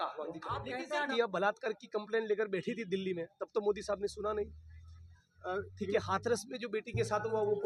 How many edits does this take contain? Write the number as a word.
one